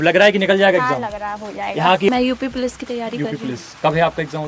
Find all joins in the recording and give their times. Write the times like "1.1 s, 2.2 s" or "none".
2.1 s

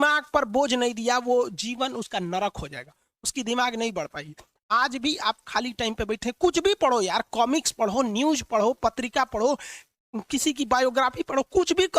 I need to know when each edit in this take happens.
none

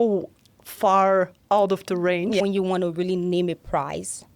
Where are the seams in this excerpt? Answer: 2.4 s

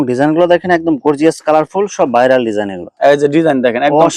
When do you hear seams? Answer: 2.8 s

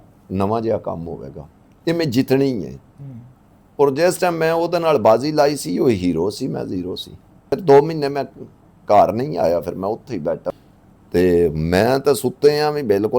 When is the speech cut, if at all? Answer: 7.5 s, 10.5 s

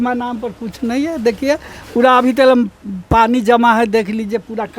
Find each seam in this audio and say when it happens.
none

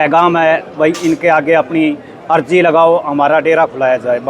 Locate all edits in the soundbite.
none

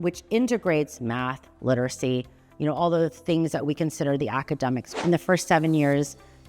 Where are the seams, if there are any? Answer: 4.9 s

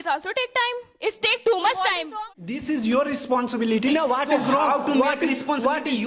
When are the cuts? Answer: 2.1 s

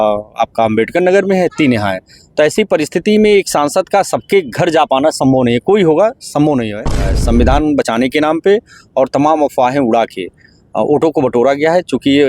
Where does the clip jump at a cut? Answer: 7.2 s

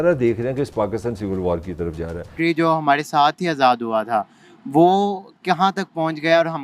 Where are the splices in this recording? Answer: 2.3 s

